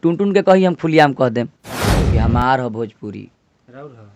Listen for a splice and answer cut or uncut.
cut